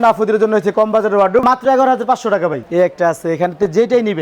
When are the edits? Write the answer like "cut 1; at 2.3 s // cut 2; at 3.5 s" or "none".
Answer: cut 1; at 1.4 s // cut 2; at 2.6 s